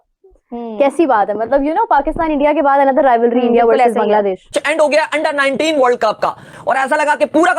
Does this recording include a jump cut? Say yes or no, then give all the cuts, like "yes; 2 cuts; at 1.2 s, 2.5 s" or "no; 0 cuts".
yes; 1 cut; at 4.4 s